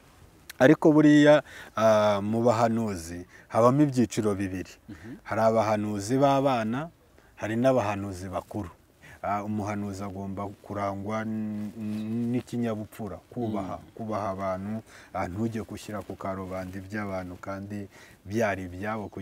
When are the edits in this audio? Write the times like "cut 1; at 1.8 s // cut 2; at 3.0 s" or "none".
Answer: cut 1; at 9.1 s